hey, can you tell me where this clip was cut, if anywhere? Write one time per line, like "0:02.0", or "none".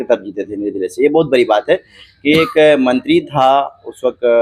none